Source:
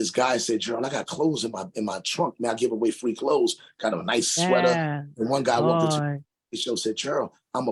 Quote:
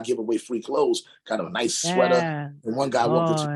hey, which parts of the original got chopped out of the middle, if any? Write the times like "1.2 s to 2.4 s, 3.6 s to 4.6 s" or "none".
none